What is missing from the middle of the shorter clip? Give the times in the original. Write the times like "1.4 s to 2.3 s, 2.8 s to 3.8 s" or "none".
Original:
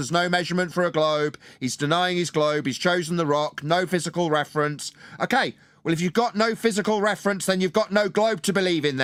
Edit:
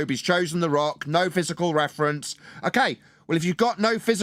none